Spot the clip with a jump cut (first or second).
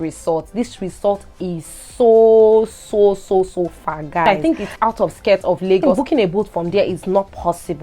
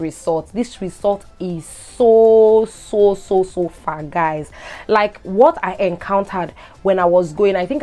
first